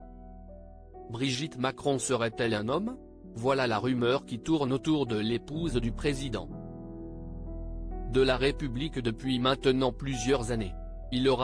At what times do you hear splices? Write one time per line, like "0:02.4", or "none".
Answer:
0:01.1
0:06.5
0:08.0